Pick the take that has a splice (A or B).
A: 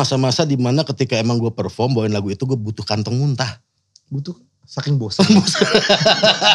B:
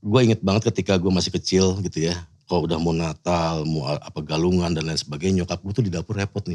B